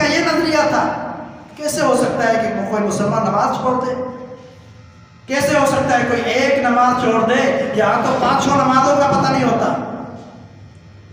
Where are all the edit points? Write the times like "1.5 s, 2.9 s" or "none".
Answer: none